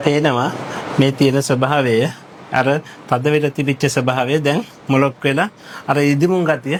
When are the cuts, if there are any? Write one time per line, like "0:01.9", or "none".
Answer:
none